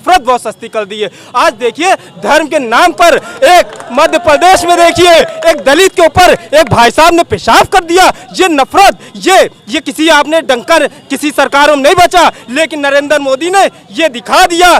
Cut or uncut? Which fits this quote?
uncut